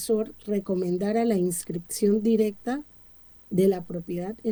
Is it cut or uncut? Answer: uncut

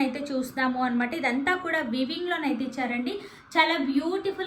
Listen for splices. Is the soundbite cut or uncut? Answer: uncut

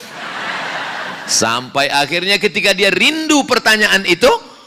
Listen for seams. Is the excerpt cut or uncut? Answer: cut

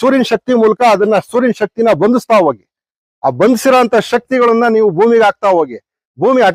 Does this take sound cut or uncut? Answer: uncut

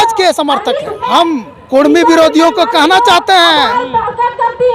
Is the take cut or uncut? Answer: cut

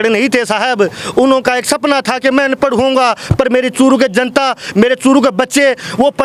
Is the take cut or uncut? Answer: uncut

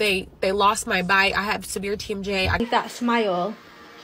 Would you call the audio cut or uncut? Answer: cut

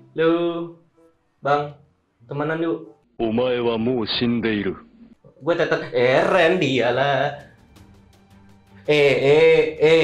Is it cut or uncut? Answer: uncut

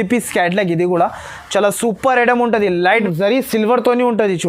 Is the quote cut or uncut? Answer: cut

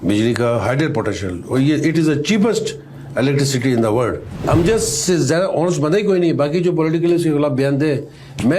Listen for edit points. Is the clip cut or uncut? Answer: cut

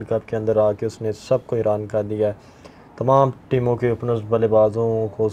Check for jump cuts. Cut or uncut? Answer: uncut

